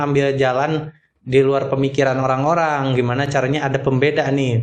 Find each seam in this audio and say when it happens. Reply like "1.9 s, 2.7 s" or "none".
none